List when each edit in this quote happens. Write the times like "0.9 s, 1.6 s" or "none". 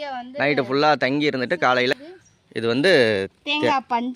2.0 s